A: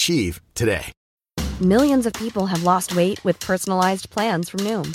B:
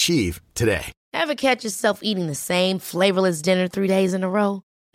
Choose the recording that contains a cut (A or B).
A